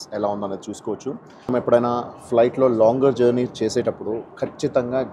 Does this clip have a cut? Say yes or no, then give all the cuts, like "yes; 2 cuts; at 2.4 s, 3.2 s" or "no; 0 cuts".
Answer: yes; 1 cut; at 1.5 s